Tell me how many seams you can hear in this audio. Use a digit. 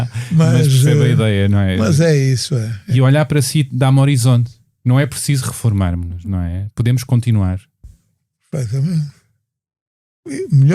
1